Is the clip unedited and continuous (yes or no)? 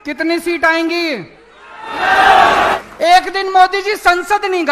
no